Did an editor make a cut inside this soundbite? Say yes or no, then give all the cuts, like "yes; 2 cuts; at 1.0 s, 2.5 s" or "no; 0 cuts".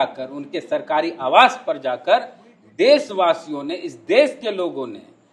no; 0 cuts